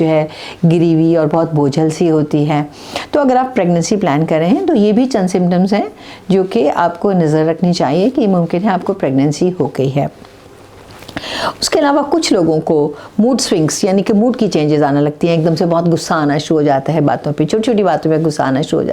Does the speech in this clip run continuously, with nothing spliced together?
yes; 0 cuts

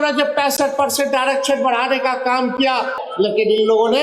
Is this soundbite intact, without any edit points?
no; 1 cut; at 3.0 s

